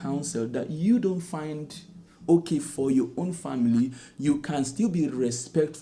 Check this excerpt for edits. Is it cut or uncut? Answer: uncut